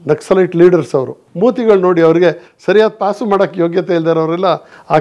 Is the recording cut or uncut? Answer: cut